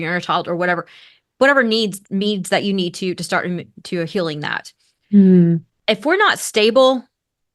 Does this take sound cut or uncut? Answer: uncut